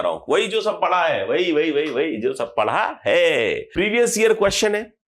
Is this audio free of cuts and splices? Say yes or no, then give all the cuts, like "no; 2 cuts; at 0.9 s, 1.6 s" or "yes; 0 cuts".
no; 1 cut; at 3.6 s